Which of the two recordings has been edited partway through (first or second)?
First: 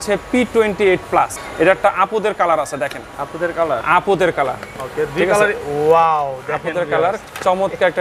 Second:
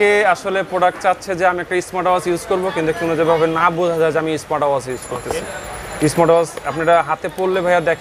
first